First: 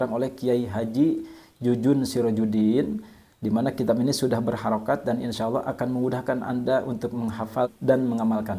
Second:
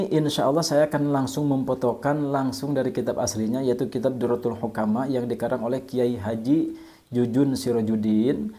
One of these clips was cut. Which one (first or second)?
first